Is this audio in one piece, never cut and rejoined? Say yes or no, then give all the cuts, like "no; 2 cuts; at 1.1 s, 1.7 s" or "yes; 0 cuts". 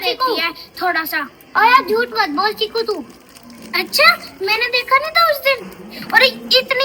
yes; 0 cuts